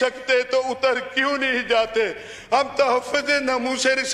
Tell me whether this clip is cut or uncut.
uncut